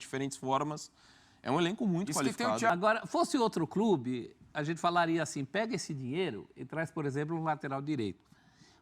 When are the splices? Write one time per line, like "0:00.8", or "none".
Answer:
0:02.7